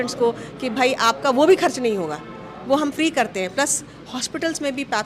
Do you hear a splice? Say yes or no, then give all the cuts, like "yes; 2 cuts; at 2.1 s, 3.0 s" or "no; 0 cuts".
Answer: no; 0 cuts